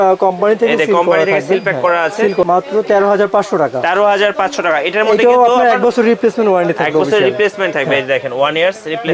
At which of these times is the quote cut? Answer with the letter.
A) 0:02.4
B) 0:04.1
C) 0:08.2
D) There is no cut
A